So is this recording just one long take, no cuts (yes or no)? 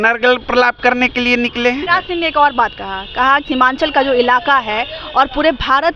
no